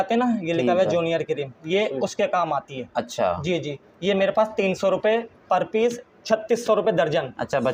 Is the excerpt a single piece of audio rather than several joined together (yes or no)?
yes